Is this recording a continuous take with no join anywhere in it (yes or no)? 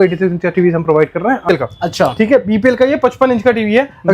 no